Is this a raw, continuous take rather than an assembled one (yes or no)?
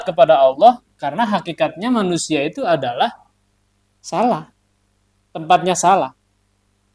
yes